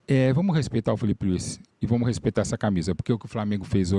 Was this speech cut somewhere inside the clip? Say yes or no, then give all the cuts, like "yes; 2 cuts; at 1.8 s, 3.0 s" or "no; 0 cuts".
no; 0 cuts